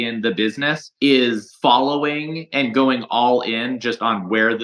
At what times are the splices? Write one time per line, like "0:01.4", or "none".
none